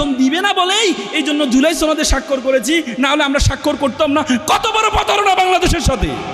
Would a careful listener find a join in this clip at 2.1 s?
no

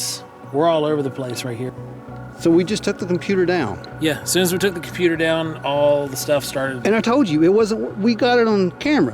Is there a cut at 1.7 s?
yes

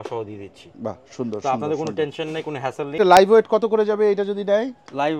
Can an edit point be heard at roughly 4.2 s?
no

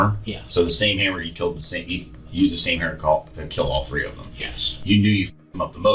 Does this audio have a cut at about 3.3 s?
no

